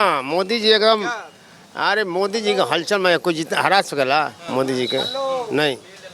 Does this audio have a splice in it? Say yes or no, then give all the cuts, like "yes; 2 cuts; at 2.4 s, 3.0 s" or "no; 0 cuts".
no; 0 cuts